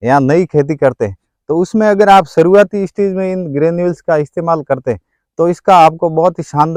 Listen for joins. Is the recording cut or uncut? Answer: uncut